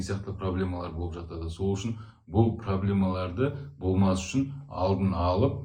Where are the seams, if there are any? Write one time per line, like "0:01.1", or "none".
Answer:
none